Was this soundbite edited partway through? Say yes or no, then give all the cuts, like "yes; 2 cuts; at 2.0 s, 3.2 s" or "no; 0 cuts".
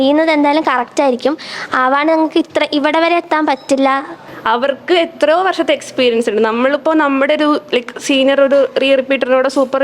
yes; 1 cut; at 4.3 s